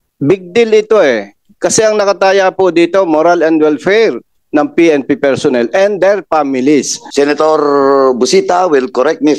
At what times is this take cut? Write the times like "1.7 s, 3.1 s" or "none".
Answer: 7.0 s